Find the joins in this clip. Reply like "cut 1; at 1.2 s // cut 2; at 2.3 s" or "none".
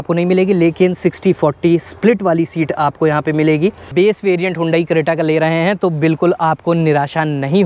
cut 1; at 3.9 s